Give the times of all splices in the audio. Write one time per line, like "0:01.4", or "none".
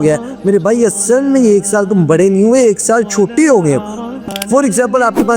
0:04.2